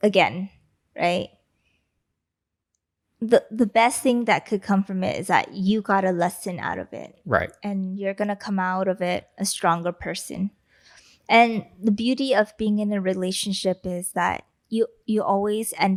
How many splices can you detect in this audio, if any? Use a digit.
0